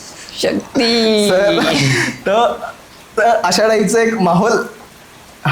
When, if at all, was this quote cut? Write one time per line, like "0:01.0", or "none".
none